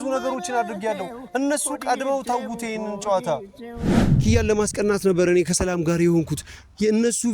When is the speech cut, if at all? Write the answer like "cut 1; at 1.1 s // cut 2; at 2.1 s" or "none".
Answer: cut 1; at 3.9 s